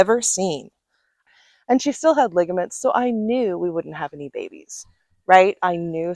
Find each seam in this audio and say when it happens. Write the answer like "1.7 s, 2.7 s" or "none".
1.2 s